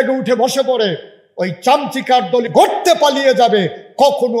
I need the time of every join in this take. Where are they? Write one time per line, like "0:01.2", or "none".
0:02.5